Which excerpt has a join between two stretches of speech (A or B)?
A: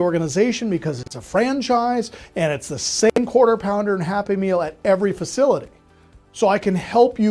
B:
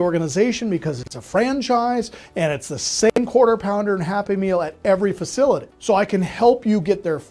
B